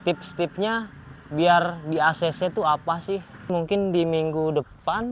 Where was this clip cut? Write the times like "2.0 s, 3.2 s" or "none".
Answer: 3.5 s

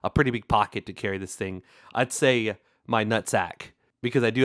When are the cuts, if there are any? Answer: none

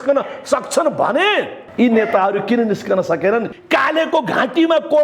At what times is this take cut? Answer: 1.6 s, 3.5 s

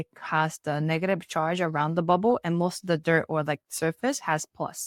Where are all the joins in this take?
none

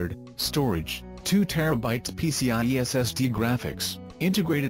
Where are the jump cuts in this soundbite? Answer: 3.1 s

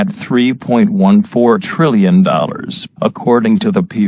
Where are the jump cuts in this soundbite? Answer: 1.9 s

